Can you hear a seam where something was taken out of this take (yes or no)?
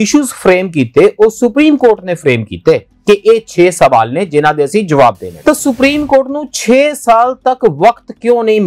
yes